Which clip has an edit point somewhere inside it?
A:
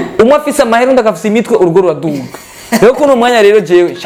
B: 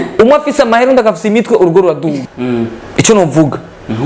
B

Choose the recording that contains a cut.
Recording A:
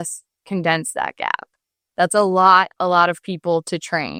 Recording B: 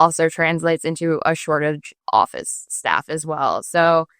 B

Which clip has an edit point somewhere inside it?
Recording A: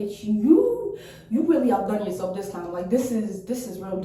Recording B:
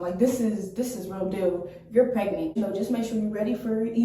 B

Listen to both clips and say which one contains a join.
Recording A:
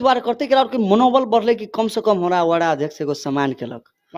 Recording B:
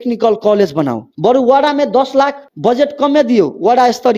B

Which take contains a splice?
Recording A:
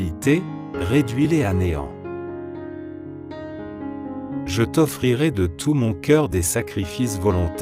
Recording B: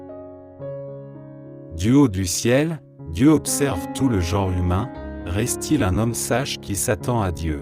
A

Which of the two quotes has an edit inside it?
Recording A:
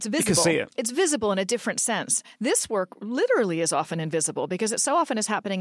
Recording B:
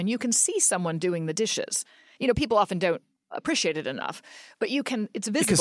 B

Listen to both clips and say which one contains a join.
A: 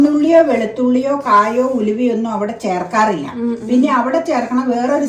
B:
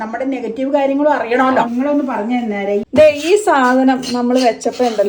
B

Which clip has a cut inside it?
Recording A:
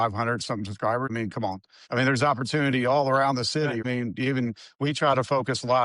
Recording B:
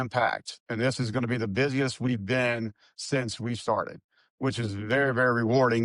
A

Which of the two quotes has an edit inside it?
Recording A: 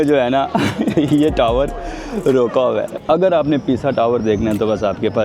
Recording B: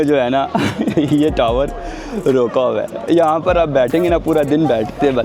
A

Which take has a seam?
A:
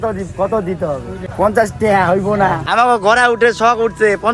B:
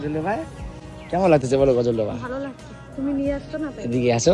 A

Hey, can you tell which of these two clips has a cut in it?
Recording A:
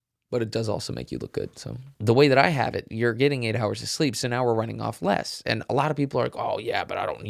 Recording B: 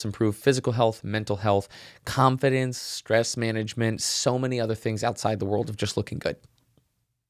A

